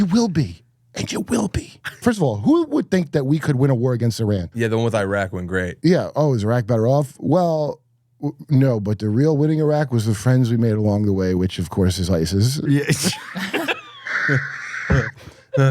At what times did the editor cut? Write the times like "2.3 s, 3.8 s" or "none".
1.9 s, 4.5 s, 5.7 s